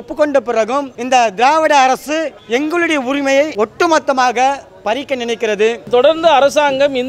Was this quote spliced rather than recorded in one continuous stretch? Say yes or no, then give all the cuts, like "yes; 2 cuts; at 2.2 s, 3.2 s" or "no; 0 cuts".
yes; 4 cuts; at 0.9 s, 2.4 s, 3.5 s, 5.9 s